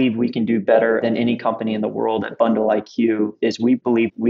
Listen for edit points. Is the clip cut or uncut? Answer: cut